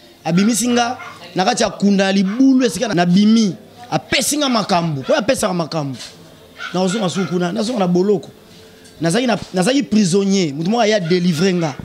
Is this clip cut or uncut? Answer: cut